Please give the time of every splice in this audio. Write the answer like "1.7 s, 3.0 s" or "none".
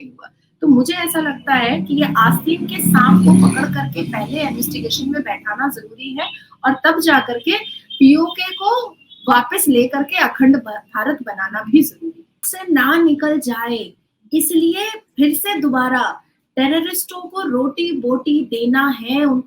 12.5 s